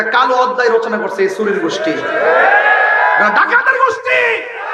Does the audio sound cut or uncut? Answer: uncut